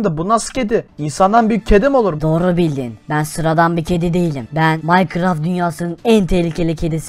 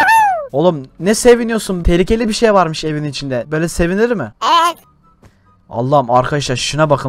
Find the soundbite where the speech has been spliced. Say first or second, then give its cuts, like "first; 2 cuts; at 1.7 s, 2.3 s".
first; 4 cuts; at 1.0 s, 2.2 s, 2.9 s, 4.8 s